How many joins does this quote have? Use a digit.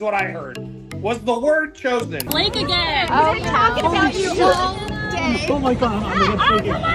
1